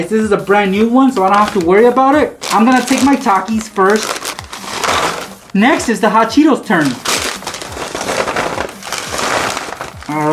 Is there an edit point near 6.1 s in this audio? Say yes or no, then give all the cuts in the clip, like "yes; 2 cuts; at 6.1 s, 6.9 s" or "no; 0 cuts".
no; 1 cut; at 7.4 s